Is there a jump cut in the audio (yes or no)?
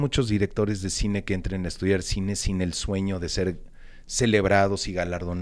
no